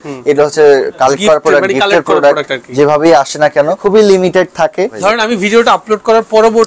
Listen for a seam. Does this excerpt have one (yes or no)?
yes